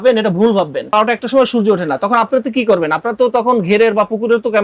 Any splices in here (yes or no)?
yes